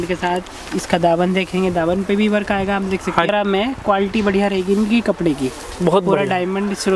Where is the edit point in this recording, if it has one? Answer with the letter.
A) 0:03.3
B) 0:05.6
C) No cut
A